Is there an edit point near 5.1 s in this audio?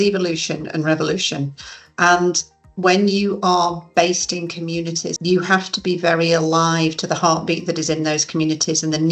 yes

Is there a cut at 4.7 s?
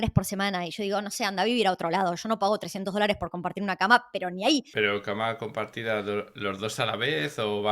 yes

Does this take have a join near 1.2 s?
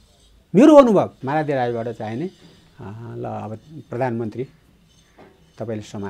yes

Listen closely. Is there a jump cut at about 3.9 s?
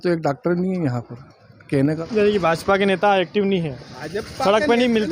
no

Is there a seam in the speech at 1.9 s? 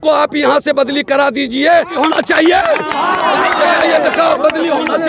yes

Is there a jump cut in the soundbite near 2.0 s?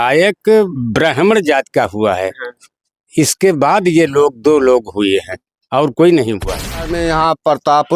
no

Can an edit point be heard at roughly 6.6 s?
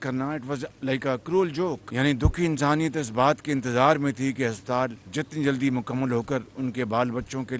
no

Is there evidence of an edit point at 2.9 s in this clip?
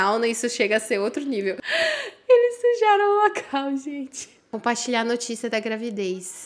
no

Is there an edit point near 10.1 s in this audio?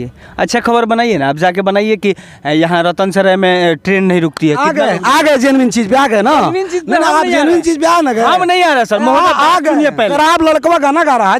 yes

